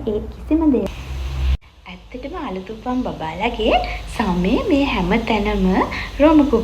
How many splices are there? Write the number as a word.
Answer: one